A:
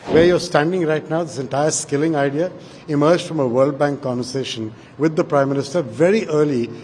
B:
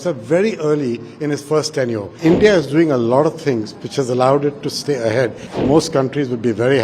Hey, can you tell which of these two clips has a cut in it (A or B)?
B